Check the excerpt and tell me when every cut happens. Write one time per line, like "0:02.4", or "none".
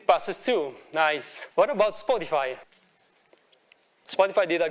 0:01.3
0:02.6